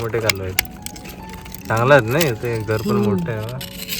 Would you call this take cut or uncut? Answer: cut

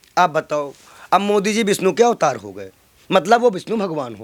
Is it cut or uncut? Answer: uncut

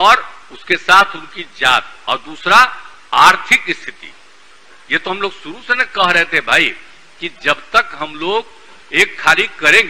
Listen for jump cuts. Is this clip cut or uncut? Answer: uncut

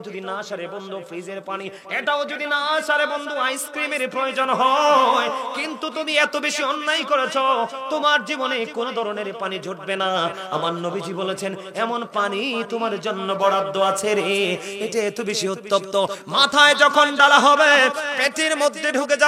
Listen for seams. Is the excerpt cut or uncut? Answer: uncut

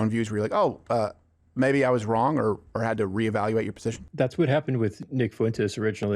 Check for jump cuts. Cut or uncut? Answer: cut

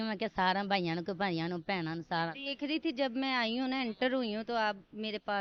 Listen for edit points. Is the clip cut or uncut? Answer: uncut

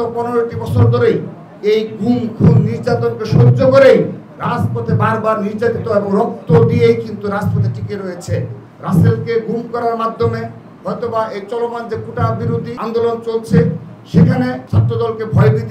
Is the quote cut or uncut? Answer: uncut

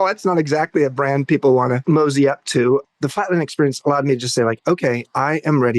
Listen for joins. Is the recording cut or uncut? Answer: cut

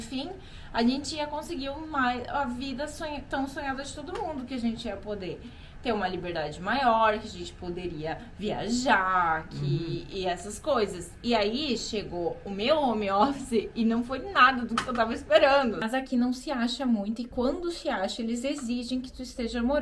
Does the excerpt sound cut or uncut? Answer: cut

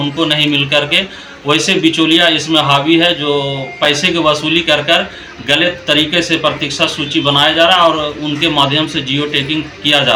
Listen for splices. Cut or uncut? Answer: uncut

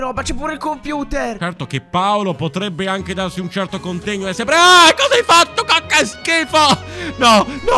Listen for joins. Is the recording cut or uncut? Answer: cut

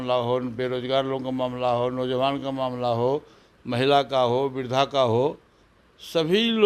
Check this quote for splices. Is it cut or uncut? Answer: uncut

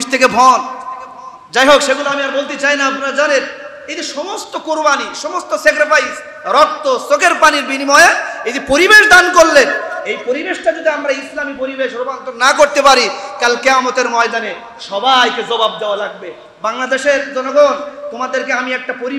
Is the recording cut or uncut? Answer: uncut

